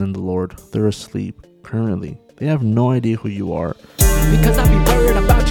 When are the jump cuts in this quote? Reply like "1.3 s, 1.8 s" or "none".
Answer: 3.8 s